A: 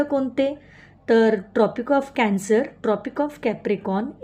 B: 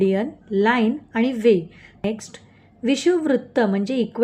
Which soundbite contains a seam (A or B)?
B